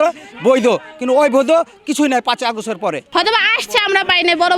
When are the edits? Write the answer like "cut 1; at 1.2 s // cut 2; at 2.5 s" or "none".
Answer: cut 1; at 3.0 s